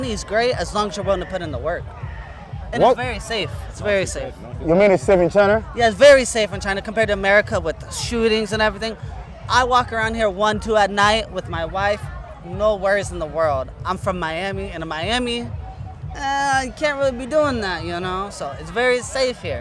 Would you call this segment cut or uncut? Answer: uncut